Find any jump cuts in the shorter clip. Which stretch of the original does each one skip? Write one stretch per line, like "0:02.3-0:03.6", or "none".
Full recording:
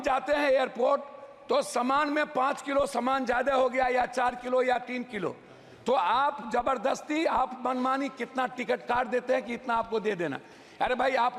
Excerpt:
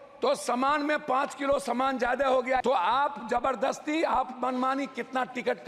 0:03.9-0:05.8

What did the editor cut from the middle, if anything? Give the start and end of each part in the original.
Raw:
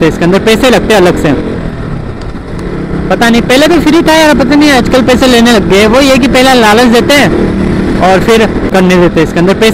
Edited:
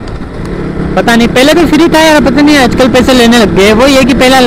none

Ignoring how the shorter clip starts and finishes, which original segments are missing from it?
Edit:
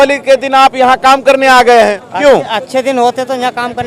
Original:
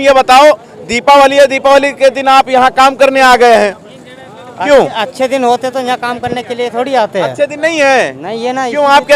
0:03.8-0:04.5

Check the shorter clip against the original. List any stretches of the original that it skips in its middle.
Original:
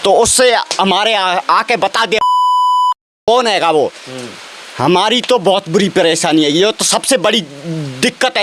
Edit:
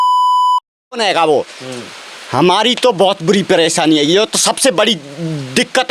0:03.3-0:03.4

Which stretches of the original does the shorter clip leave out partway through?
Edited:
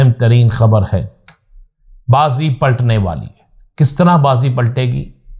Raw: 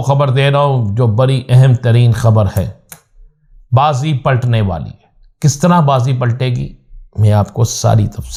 none

